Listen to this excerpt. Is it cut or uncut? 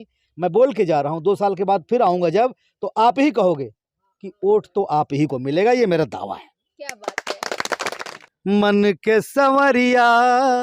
cut